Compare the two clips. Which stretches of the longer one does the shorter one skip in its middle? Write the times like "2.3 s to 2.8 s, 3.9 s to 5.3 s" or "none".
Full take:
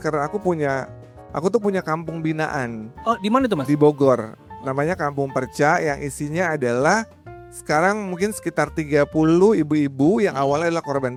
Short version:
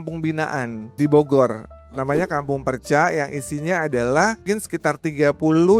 2.9 s to 3.6 s, 7.1 s to 8.1 s